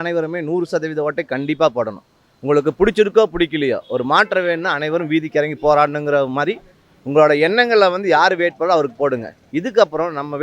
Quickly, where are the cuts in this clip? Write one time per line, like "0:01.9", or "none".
none

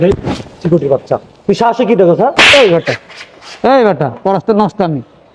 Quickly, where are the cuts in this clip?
0:02.3

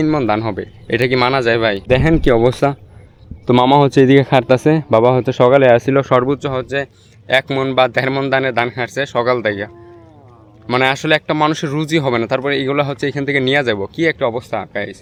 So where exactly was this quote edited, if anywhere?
none

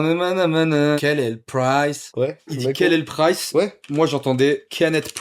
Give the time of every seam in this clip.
0:01.0
0:02.6

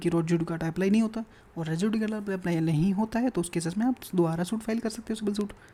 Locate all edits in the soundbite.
none

